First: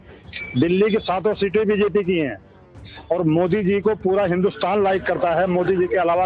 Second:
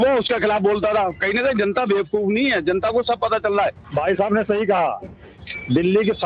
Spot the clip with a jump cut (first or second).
second